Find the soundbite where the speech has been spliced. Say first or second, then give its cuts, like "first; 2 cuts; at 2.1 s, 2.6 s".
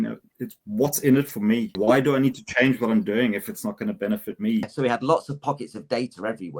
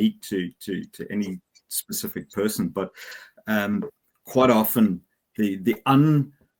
first; 2 cuts; at 1.7 s, 4.7 s